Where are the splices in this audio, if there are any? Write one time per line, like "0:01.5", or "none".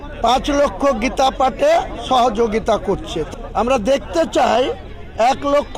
0:03.2